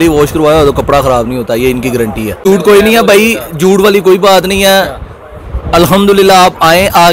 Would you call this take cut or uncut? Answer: cut